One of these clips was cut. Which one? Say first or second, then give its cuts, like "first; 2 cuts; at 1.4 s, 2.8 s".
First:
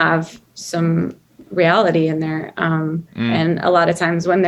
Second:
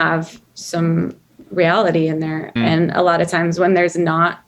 second; 1 cut; at 2.5 s